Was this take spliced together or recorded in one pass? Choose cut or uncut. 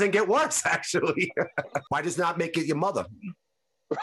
cut